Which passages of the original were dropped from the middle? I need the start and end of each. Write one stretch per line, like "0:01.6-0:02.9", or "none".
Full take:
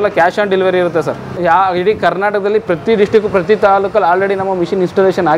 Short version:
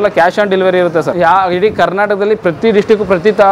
0:01.1-0:01.4